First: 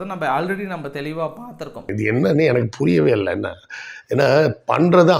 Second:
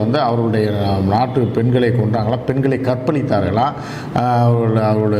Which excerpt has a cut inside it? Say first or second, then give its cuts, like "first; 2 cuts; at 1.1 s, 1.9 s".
first; 1 cut; at 1.9 s